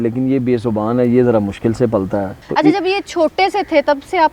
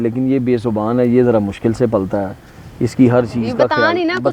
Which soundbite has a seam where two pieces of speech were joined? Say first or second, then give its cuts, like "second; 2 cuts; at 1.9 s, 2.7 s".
first; 1 cut; at 2.4 s